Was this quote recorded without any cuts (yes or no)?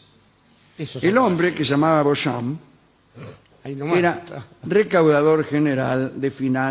no